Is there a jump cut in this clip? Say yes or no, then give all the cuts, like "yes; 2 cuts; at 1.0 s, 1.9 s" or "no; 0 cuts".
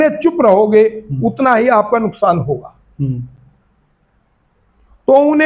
no; 0 cuts